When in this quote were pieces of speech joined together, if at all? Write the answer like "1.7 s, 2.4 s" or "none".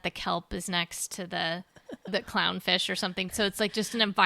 1.9 s, 3.3 s